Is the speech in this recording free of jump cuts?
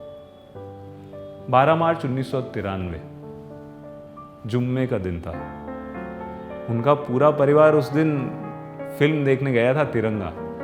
no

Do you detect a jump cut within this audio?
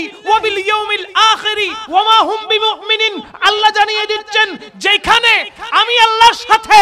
no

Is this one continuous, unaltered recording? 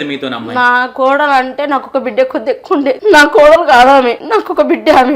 no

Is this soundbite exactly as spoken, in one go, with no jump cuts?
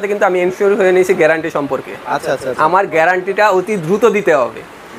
yes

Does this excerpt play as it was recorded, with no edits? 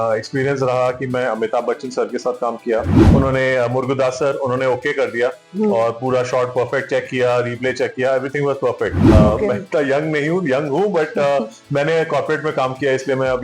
no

